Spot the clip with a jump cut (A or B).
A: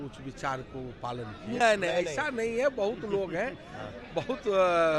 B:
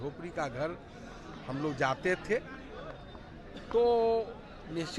A